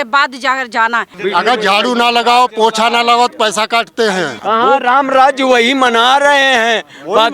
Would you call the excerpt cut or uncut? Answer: cut